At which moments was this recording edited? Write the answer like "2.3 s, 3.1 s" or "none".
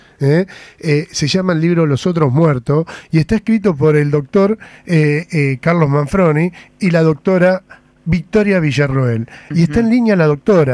9.7 s